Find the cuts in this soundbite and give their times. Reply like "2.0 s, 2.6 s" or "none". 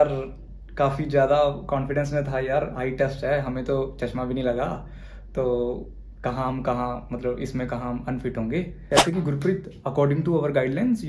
8.8 s